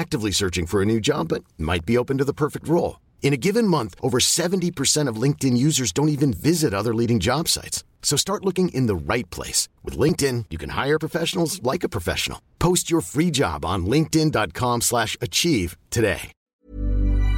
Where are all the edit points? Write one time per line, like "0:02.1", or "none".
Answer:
0:16.4